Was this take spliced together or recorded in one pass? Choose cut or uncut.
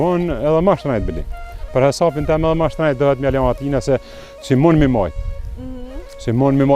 uncut